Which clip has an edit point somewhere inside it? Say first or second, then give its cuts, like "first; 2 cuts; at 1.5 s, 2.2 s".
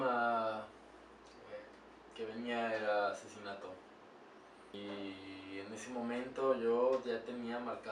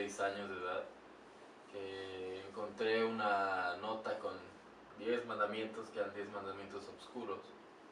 first; 1 cut; at 4.7 s